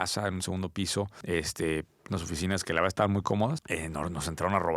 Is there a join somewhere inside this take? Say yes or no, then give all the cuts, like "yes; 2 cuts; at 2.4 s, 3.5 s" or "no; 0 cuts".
yes; 2 cuts; at 1.2 s, 3.7 s